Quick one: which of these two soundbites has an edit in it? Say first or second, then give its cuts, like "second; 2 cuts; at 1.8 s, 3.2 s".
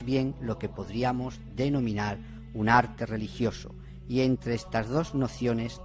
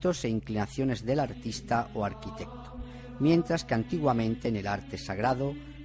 second; 1 cut; at 4.9 s